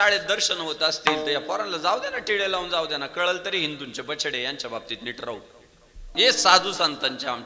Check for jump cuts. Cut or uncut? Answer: uncut